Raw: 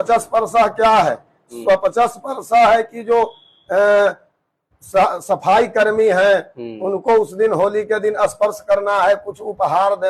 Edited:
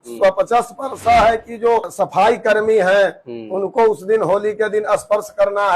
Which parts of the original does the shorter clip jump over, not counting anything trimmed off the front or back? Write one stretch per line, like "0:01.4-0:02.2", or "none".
0:03.4-0:05.2